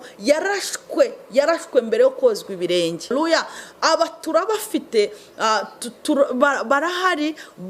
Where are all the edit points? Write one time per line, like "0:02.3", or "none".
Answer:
0:03.1